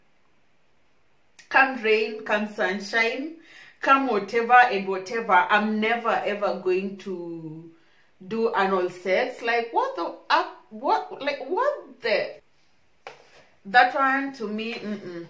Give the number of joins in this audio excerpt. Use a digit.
1